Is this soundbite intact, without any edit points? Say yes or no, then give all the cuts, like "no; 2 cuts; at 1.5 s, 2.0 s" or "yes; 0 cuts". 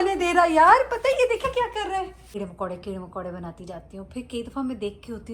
no; 1 cut; at 2.4 s